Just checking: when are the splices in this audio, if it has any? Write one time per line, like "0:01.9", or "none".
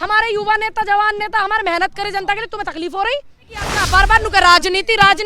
0:03.8